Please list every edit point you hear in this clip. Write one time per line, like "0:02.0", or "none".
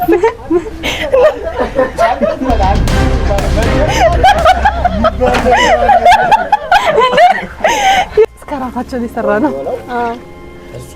0:08.3